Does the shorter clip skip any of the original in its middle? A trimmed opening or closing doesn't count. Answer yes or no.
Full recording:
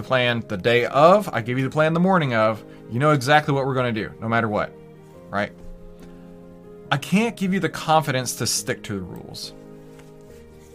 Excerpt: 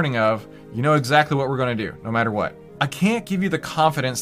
yes